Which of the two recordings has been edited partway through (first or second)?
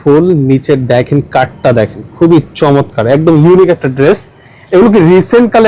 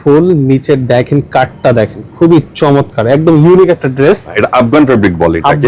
second